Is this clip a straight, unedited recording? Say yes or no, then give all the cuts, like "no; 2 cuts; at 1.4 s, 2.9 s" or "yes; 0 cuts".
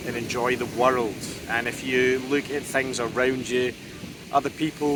yes; 0 cuts